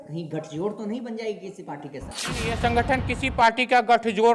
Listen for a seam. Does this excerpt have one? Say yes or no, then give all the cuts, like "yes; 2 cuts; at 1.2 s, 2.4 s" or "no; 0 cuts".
yes; 1 cut; at 2.4 s